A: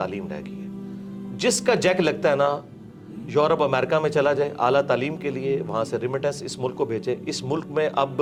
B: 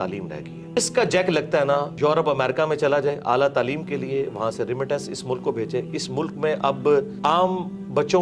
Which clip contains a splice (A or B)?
B